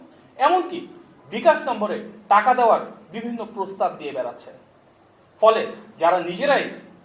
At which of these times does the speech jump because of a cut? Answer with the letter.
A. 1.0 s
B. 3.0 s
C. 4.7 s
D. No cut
D